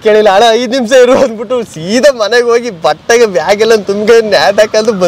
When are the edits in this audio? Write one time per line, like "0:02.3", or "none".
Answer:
none